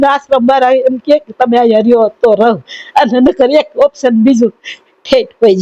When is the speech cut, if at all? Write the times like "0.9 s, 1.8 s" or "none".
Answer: none